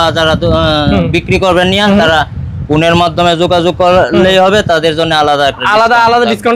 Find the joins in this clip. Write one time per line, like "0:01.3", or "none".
none